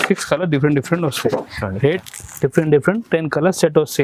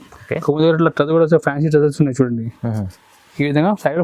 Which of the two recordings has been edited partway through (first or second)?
first